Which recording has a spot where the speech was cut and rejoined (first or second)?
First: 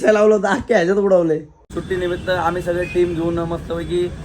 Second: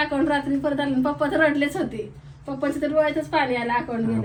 first